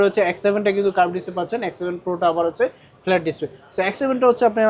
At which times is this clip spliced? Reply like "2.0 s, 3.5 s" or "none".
none